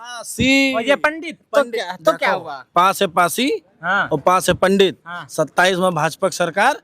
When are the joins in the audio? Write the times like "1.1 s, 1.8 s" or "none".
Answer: 2.6 s